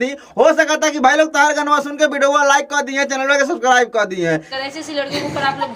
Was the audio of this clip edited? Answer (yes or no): yes